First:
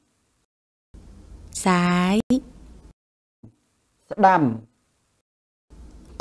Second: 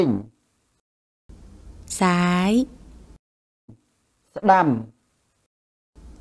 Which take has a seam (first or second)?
first